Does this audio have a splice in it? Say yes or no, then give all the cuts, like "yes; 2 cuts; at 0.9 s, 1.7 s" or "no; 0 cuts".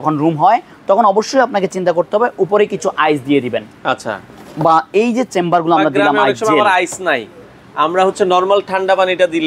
no; 0 cuts